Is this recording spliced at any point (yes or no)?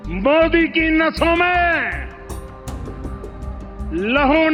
no